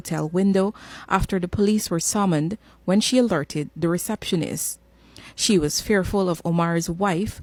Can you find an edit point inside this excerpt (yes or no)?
no